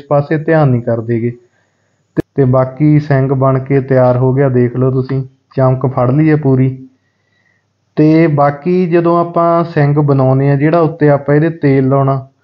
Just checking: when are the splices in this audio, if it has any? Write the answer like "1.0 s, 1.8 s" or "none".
2.2 s